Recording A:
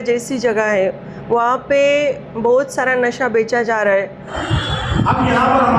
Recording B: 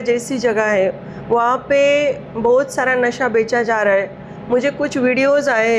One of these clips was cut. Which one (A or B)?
A